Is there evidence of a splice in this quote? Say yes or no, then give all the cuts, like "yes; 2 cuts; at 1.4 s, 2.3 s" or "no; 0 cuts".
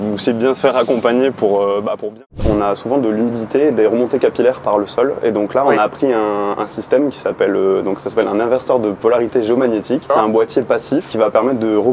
yes; 4 cuts; at 2.4 s, 9.0 s, 10.1 s, 11.1 s